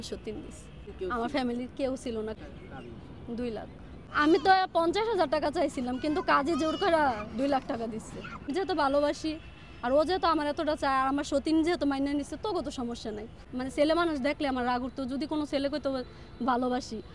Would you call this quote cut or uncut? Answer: cut